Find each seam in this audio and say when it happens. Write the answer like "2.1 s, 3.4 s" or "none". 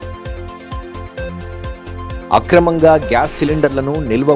none